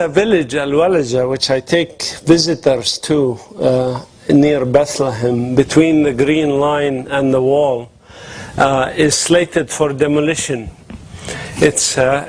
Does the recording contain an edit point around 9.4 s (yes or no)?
no